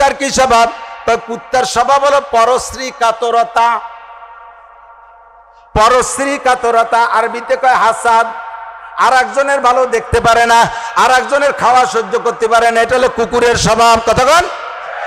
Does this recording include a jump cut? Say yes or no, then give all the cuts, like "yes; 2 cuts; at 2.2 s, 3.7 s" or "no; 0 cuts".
no; 0 cuts